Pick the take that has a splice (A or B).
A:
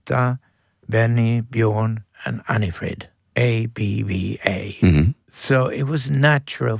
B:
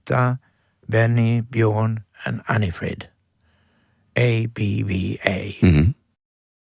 A